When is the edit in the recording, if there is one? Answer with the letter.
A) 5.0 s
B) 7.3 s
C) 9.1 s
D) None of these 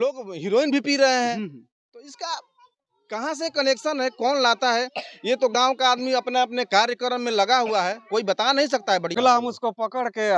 C